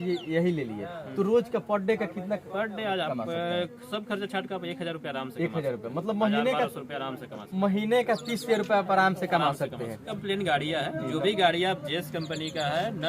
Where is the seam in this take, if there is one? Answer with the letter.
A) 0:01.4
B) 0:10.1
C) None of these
B